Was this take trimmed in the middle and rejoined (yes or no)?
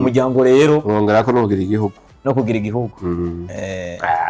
no